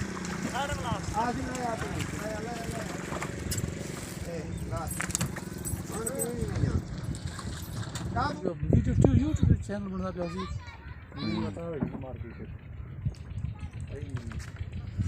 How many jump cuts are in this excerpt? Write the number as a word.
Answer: one